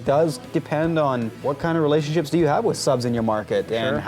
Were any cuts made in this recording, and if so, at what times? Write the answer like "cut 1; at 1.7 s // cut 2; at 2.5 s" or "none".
cut 1; at 1.4 s

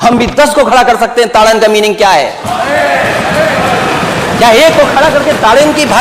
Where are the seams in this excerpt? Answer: none

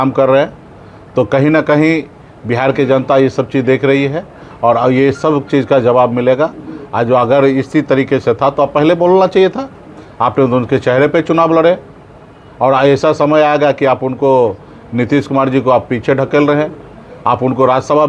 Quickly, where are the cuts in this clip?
none

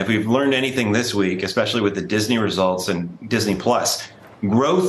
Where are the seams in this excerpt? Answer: none

